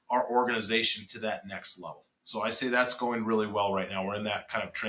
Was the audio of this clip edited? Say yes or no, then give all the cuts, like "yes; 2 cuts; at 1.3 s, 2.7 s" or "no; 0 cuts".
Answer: no; 0 cuts